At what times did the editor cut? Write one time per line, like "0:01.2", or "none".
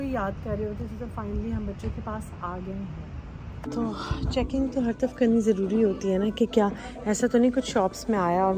0:03.6